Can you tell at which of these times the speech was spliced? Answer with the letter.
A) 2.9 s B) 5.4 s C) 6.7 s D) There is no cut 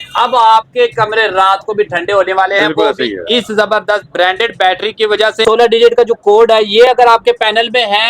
B